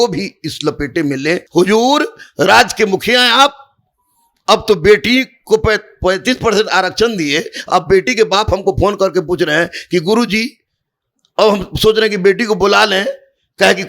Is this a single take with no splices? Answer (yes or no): no